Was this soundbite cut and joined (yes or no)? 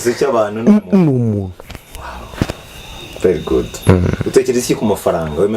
no